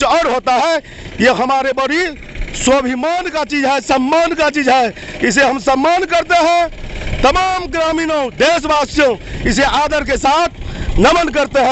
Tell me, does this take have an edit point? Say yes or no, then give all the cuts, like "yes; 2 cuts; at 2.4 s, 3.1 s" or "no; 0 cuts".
no; 0 cuts